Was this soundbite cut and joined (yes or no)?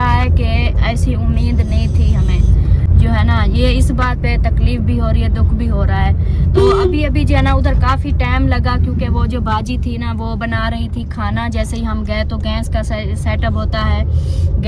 no